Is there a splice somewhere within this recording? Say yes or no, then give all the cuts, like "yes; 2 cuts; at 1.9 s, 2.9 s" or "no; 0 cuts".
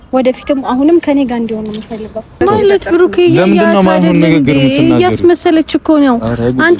yes; 1 cut; at 2.4 s